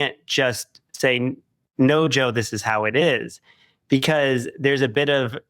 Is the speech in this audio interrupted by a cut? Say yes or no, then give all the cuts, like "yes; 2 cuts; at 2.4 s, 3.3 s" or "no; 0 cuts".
no; 0 cuts